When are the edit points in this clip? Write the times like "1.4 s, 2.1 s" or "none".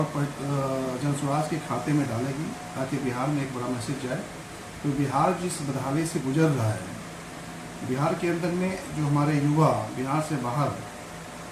none